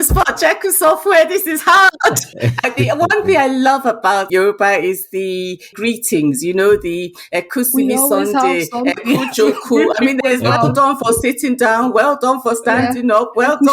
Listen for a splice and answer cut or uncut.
cut